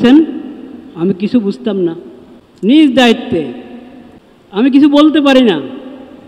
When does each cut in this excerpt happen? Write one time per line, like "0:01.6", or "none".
0:02.7
0:04.7

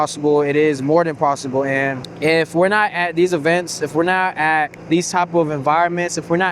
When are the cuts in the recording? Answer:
0:02.1
0:04.8

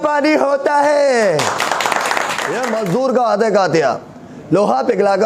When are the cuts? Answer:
0:02.5

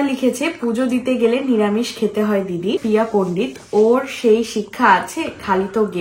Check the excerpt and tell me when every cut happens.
0:02.8

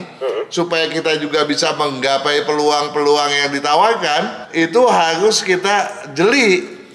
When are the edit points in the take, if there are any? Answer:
0:04.4

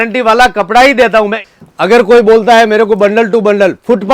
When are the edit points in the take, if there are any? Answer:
0:01.4

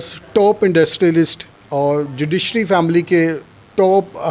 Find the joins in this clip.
none

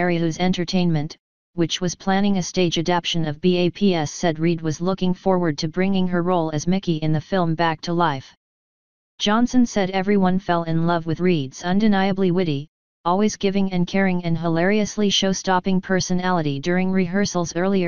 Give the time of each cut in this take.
none

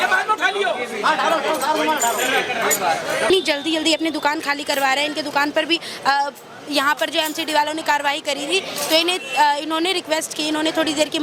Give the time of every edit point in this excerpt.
0:03.3

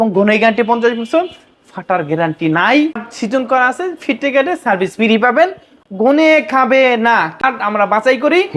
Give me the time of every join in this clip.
0:03.0
0:07.4

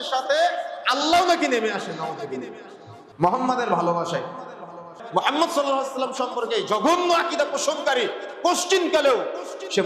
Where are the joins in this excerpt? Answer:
0:05.0

